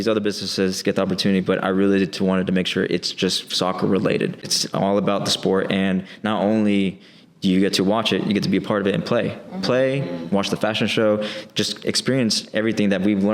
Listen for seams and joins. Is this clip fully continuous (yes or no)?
no